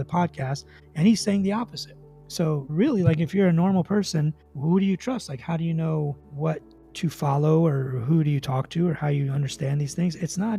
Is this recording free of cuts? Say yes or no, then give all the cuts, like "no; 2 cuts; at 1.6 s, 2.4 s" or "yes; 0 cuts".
yes; 0 cuts